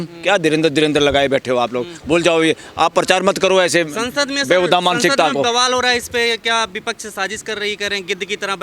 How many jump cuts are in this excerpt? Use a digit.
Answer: 0